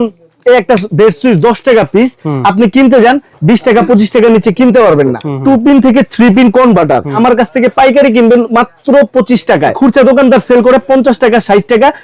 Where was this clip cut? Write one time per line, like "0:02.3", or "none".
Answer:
0:05.3
0:07.1
0:09.8